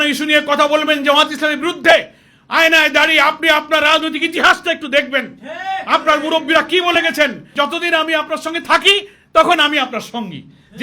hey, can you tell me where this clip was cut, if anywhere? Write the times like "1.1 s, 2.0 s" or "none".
7.5 s

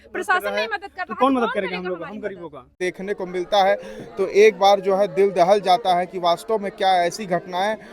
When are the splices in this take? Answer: 2.8 s

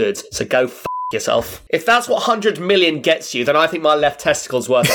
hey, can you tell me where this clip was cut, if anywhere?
1.6 s

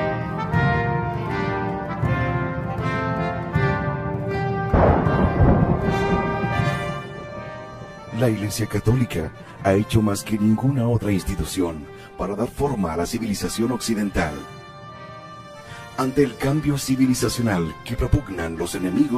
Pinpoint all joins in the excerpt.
16.4 s

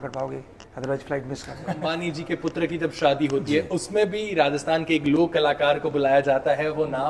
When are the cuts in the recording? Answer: 1.9 s

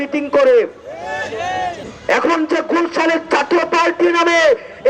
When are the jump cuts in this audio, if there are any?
1.9 s

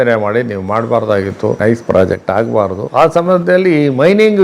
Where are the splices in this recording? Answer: 1.6 s, 2.8 s

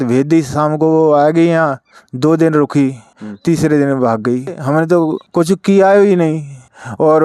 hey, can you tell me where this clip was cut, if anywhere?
4.6 s

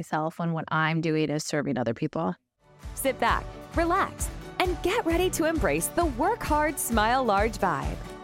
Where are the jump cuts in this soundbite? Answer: 2.2 s

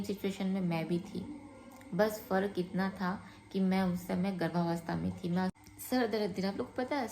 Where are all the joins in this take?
5.6 s

